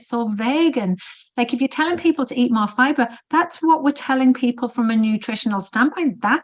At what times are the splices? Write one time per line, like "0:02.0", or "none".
none